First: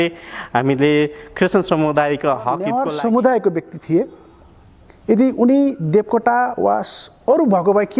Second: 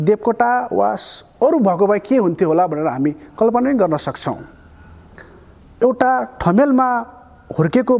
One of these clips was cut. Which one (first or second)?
first